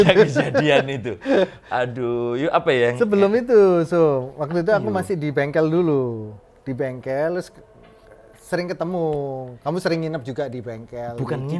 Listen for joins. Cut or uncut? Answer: uncut